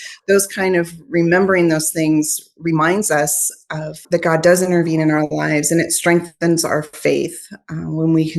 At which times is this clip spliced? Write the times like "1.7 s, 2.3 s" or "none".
4.0 s